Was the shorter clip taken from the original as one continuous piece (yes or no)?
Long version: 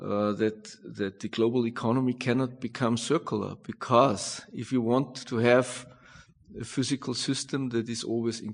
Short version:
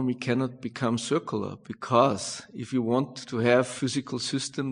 no